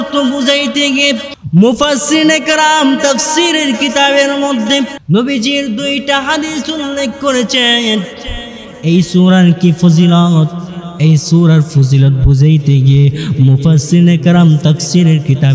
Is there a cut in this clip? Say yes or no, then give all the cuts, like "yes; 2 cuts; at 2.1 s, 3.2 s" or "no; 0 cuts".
yes; 2 cuts; at 1.3 s, 5.0 s